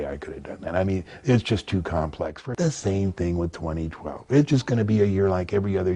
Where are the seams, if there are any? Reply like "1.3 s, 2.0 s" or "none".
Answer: 2.4 s